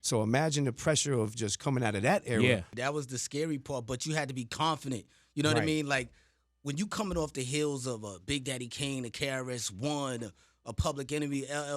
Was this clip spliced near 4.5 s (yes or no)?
no